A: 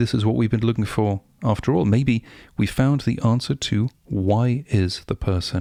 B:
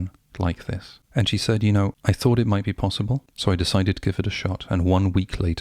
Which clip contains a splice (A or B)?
B